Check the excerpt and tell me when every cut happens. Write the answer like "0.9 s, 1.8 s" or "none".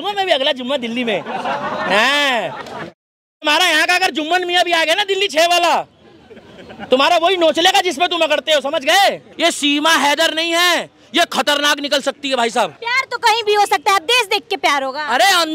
9.3 s, 12.8 s